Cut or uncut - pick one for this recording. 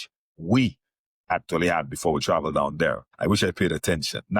cut